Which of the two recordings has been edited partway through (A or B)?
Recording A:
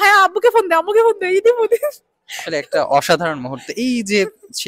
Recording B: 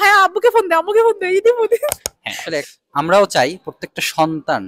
B